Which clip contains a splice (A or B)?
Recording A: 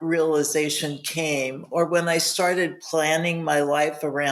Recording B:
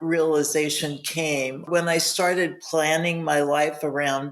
B